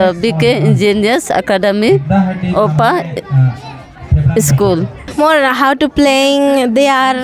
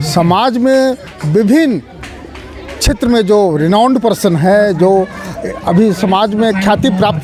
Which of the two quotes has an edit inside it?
first; 1 cut; at 5.1 s

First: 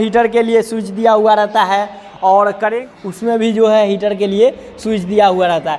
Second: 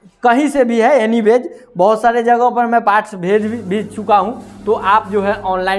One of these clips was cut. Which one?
first; 1 cut; at 2.8 s

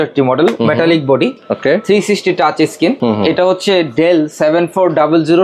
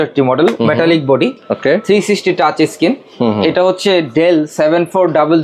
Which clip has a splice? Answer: first; 1 cut; at 3.0 s

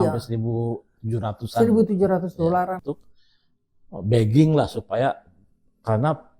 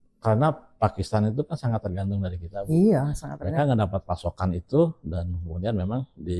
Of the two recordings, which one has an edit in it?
first; 1 cut; at 2.8 s

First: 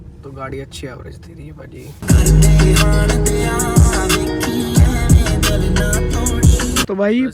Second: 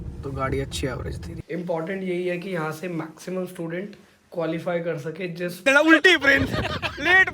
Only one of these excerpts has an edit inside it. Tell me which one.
second; 2 cuts; at 1.3 s, 5.6 s

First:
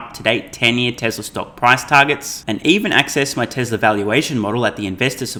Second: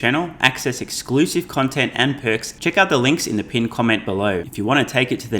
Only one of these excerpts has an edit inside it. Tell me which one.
second; 2 cuts; at 2.5 s, 4.5 s

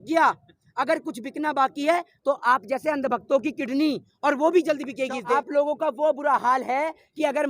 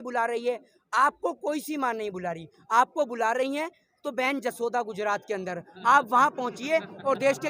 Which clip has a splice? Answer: first; 1 cut; at 5.3 s

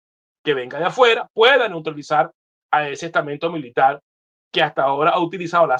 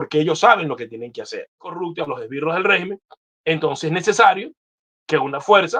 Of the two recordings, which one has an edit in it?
second; 1 cut; at 1.8 s

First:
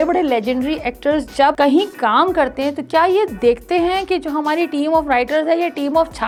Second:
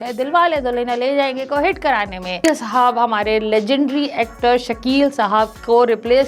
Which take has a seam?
second; 1 cut; at 2.4 s

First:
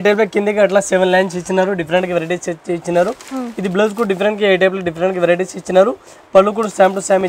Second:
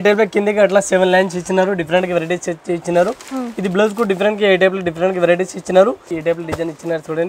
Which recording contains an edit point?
second; 1 cut; at 6.1 s

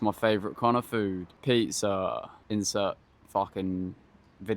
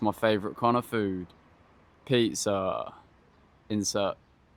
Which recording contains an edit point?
first; 3 cuts; at 1.3 s, 2.3 s, 3.1 s

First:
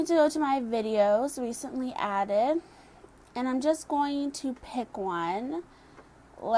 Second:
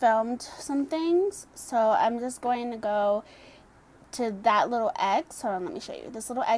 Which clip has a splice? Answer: second; 1 cut; at 3.0 s

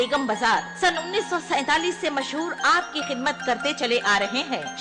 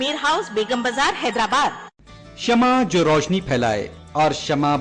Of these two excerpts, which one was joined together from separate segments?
second; 1 cut; at 2.1 s

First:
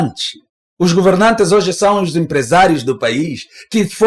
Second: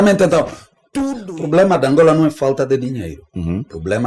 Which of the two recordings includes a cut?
second; 1 cut; at 1.0 s

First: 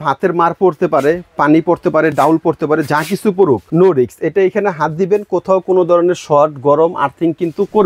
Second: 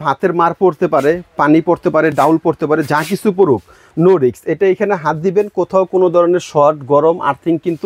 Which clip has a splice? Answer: first; 1 cut; at 3.7 s

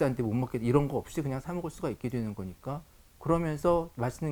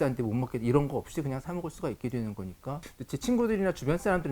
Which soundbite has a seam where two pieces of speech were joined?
second; 1 cut; at 2.9 s

